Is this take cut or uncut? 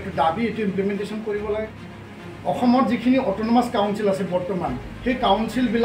cut